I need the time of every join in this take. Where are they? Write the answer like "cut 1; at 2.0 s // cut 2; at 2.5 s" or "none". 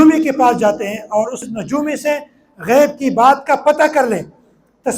cut 1; at 1.5 s